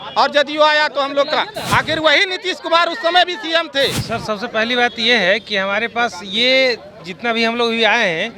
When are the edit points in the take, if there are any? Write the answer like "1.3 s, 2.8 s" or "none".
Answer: 4.0 s